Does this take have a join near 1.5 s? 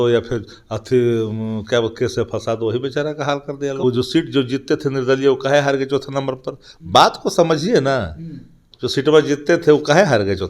no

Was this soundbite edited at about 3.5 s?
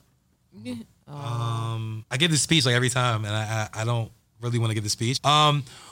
no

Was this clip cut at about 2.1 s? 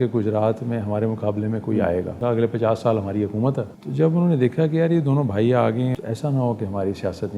yes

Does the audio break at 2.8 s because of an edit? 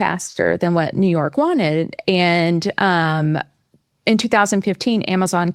no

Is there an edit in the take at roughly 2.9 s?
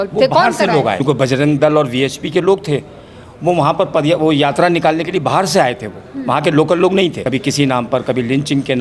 no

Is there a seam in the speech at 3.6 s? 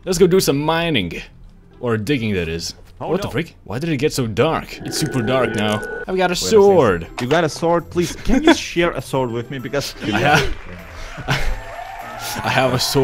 yes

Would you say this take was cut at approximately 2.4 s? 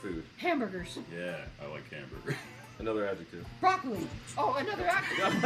yes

